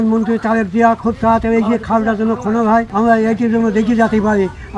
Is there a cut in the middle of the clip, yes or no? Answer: no